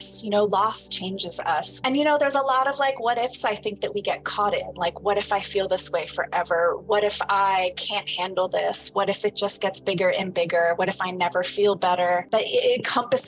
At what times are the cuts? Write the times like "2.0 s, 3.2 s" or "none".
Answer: 1.7 s, 12.3 s